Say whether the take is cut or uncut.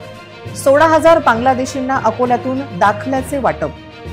uncut